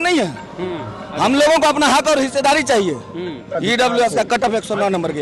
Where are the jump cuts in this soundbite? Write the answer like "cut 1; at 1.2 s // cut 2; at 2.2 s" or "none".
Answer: cut 1; at 3.5 s